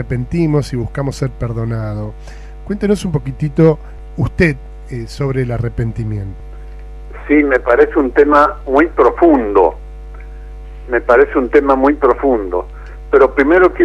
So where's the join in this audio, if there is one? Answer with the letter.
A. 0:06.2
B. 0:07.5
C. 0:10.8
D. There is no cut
A